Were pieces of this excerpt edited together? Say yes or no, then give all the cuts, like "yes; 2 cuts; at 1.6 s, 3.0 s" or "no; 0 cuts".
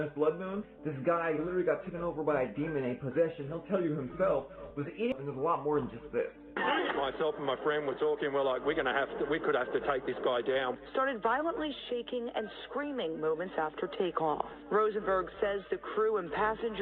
yes; 1 cut; at 5.2 s